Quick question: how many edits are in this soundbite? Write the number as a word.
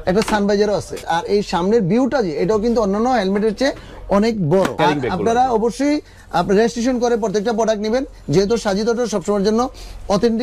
two